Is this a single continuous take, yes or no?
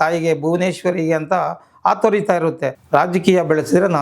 no